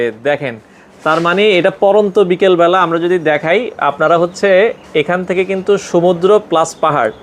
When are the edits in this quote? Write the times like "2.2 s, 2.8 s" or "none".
none